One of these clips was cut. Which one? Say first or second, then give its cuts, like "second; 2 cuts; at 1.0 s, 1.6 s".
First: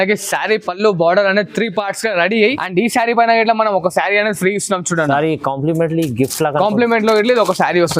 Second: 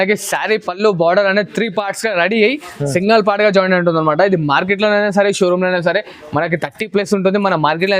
first; 1 cut; at 2.6 s